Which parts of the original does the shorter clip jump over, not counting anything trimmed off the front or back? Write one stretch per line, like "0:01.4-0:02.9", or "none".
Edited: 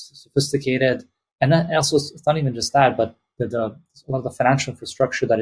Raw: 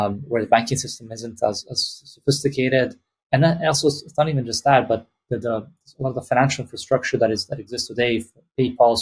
none